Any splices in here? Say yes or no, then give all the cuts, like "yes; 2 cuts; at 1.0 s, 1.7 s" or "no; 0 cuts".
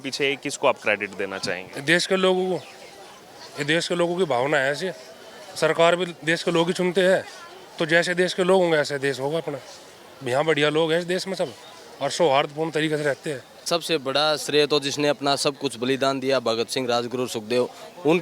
yes; 1 cut; at 13.6 s